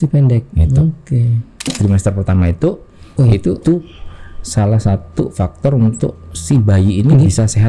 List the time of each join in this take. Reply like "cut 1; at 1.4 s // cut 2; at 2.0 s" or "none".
cut 1; at 1.7 s